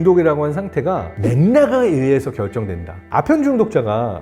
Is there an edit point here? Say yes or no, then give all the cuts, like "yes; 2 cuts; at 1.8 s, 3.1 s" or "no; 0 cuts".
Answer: yes; 1 cut; at 3.0 s